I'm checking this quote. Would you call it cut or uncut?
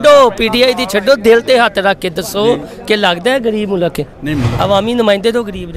cut